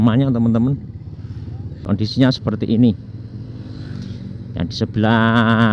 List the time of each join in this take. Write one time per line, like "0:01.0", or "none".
0:01.8